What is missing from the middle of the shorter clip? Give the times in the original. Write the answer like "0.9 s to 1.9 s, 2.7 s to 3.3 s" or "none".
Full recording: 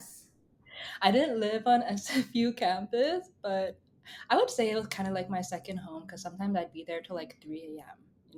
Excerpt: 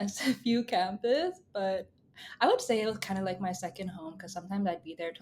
none